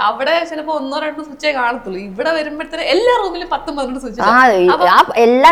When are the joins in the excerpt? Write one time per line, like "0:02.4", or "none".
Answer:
none